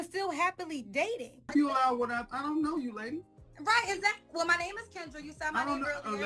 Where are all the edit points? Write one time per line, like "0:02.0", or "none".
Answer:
0:01.5